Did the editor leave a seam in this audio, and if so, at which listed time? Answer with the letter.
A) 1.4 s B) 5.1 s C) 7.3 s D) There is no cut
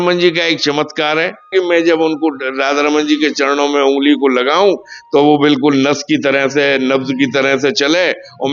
A